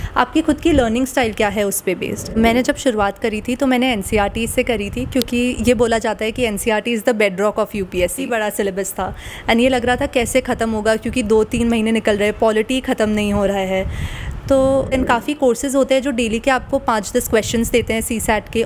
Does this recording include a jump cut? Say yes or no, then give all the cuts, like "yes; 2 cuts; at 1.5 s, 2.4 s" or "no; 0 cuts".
yes; 3 cuts; at 2.4 s, 8.2 s, 14.9 s